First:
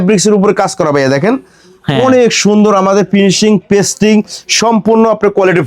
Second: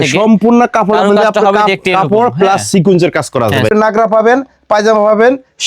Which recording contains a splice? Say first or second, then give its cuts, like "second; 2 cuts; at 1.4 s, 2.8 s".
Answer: second; 1 cut; at 3.7 s